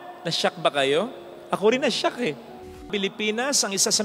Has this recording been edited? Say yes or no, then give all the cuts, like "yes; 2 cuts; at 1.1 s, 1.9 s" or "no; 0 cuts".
yes; 1 cut; at 2.9 s